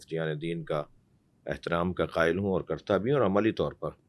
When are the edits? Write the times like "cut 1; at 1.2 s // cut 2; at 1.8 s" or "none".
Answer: none